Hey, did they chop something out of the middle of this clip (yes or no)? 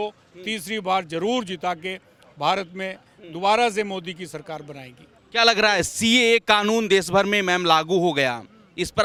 no